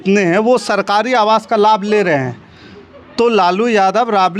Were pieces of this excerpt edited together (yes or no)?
no